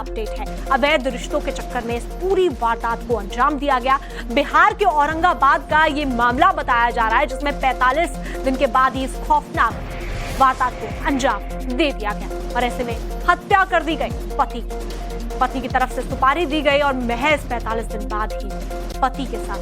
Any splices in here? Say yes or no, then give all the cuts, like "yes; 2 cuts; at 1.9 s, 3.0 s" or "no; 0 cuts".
yes; 1 cut; at 8.6 s